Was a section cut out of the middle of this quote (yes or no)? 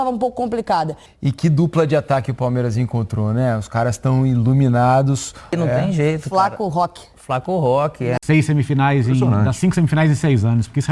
yes